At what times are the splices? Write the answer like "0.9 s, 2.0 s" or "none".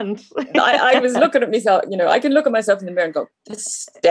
none